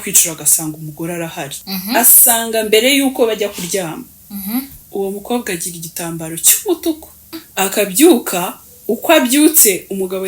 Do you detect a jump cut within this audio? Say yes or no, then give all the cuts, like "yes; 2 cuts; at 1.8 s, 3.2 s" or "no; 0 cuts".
yes; 2 cuts; at 1.6 s, 7.4 s